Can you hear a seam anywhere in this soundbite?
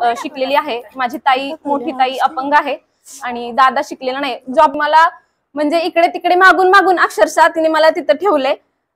yes; 1 cut; at 4.8 s

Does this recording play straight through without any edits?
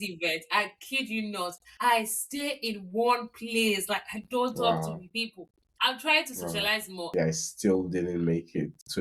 no; 2 cuts; at 1.6 s, 7.1 s

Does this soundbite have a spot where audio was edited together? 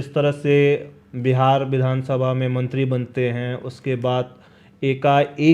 no; 0 cuts

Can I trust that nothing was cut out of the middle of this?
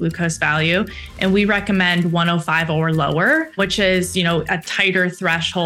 no; 1 cut; at 3.6 s

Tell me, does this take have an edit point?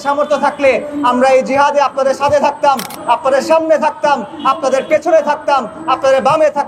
no; 0 cuts

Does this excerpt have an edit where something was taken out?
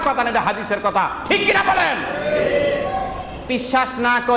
yes; 1 cut; at 3.5 s

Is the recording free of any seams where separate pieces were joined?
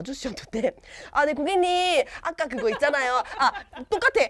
yes; 0 cuts

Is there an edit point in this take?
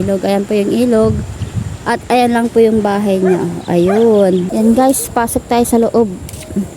yes; 1 cut; at 4.5 s

